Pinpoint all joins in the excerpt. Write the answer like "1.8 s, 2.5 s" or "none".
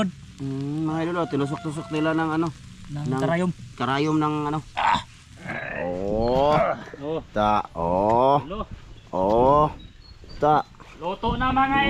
5.5 s